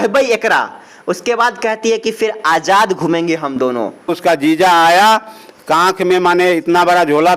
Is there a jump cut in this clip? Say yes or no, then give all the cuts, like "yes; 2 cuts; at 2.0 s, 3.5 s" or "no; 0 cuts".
yes; 1 cut; at 4.2 s